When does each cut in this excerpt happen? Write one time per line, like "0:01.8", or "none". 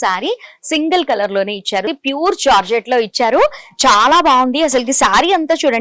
0:01.9